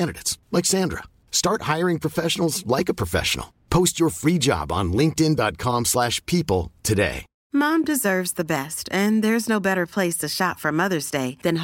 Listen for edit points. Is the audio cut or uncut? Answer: cut